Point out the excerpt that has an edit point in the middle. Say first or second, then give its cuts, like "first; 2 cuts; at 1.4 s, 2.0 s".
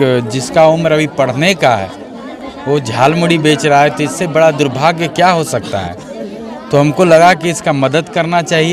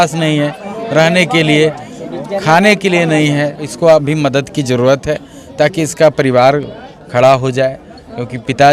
second; 1 cut; at 3.6 s